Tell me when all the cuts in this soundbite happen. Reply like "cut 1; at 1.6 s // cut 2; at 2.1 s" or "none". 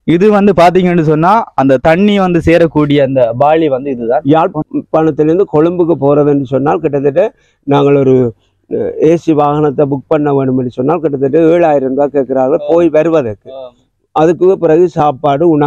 cut 1; at 4.2 s